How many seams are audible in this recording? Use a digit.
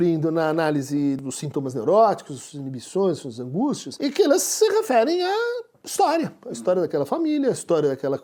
2